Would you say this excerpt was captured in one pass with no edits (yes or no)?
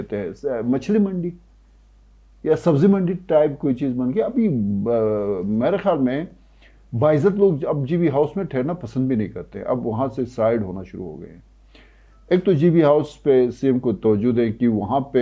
yes